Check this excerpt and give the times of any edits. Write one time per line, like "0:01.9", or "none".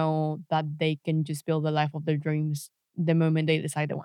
none